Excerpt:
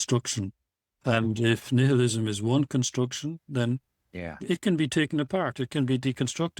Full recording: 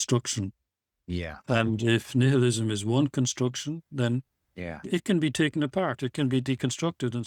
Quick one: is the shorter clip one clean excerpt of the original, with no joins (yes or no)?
no